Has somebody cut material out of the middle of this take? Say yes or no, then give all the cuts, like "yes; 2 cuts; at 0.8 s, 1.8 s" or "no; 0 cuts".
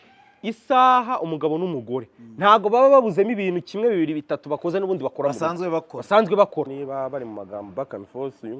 yes; 1 cut; at 6.8 s